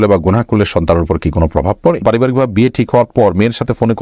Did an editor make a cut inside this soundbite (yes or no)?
yes